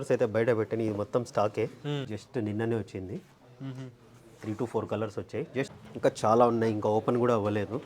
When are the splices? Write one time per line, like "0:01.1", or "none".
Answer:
0:02.1
0:05.7